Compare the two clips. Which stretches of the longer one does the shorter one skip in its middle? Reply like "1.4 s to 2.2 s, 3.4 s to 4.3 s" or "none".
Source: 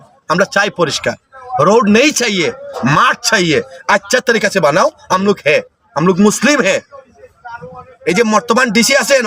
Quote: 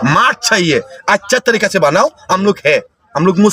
none